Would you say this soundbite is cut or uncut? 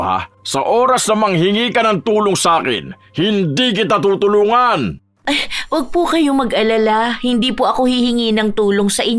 cut